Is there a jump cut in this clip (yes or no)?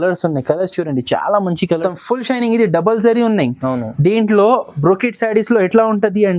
yes